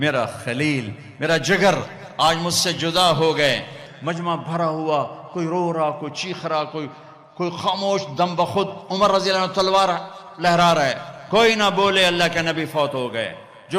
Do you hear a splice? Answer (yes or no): yes